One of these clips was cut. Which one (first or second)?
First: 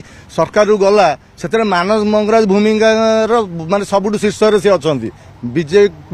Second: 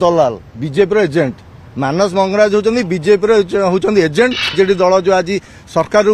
second